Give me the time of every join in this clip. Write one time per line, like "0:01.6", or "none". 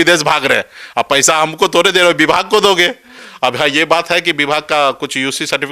none